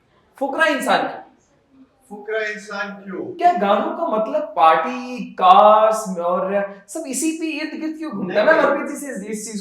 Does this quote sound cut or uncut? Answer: cut